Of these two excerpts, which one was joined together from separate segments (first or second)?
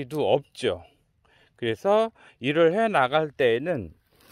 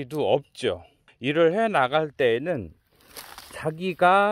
second